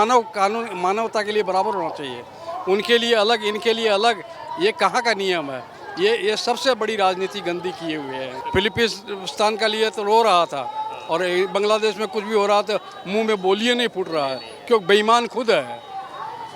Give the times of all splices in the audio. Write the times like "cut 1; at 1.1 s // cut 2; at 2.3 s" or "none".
cut 1; at 8.4 s